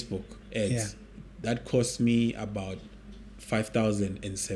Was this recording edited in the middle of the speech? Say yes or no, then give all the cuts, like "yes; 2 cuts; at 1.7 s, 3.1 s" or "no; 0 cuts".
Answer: no; 0 cuts